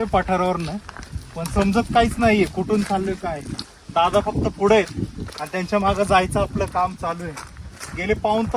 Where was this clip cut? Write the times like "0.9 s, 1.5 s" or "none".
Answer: none